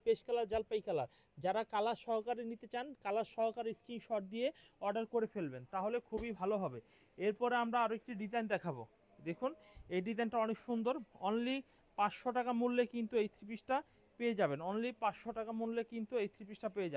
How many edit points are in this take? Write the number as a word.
zero